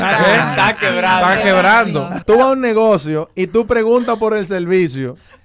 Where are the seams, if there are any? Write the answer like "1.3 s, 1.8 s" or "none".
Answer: 2.2 s